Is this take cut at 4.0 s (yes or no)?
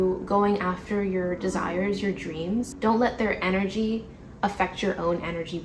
no